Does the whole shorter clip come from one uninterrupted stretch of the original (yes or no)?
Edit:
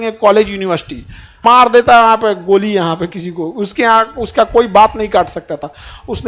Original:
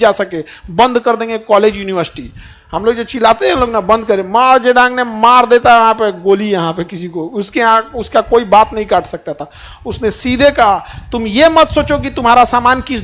no